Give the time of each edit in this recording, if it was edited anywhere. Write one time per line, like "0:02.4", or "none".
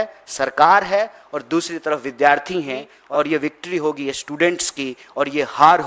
0:02.9